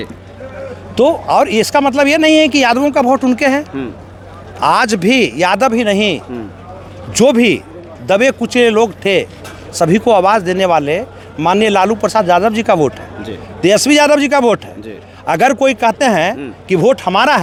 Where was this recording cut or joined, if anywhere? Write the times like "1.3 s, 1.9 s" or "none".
none